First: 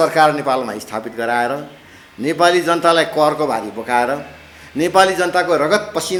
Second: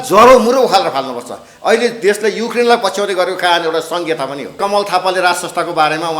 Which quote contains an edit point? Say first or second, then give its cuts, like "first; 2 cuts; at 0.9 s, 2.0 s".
second; 1 cut; at 4.6 s